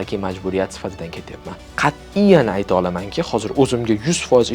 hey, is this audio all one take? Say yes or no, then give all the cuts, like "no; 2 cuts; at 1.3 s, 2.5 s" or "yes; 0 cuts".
no; 1 cut; at 1.6 s